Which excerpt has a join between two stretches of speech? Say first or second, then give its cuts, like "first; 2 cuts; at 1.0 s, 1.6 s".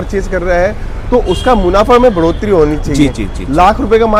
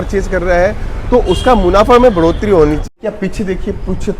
second; 1 cut; at 2.8 s